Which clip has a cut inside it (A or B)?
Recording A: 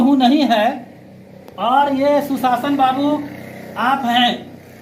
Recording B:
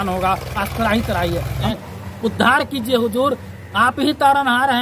B